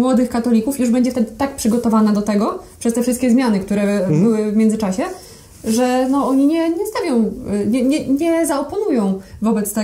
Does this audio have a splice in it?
no; 0 cuts

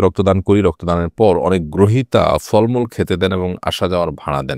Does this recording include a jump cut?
no; 0 cuts

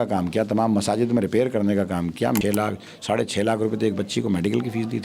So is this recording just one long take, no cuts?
no; 1 cut; at 2.4 s

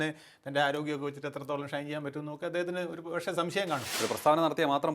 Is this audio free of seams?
no; 1 cut; at 3.9 s

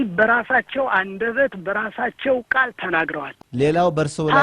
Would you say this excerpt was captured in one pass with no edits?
no; 1 cut; at 3.3 s

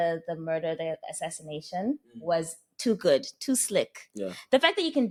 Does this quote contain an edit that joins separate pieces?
no; 0 cuts

